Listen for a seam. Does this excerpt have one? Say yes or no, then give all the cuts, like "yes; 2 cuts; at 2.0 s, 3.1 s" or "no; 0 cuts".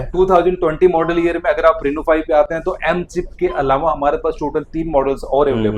no; 0 cuts